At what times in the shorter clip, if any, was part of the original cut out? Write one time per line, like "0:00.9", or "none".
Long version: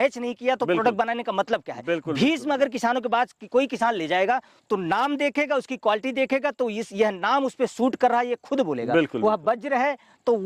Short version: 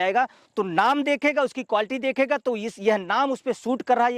none